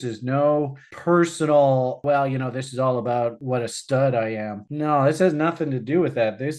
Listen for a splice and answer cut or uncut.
cut